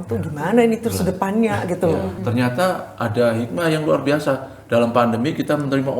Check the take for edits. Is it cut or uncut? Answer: cut